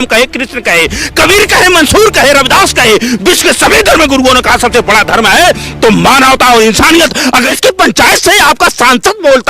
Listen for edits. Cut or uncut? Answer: cut